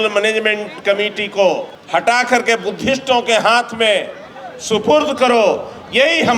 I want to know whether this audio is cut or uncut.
uncut